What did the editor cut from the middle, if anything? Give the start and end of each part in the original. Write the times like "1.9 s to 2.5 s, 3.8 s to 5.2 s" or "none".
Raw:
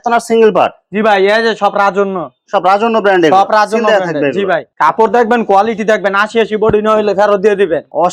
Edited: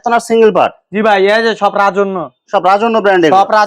none